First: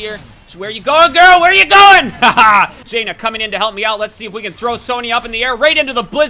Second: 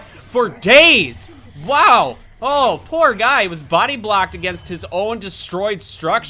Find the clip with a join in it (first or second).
first